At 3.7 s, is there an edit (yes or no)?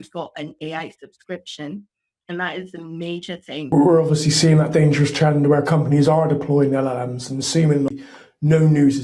yes